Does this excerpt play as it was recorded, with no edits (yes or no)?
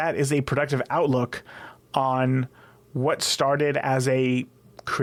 yes